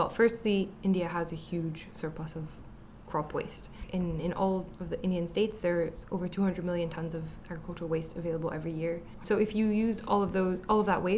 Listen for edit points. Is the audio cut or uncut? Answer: cut